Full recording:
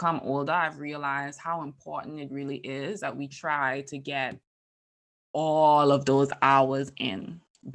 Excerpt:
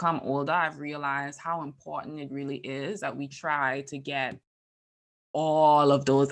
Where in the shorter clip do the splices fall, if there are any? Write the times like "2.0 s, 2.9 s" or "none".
none